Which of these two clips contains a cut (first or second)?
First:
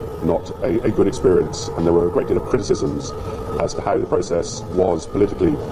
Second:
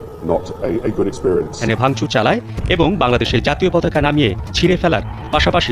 second